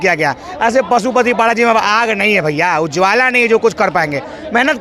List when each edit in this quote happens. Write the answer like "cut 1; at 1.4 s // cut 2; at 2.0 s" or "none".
none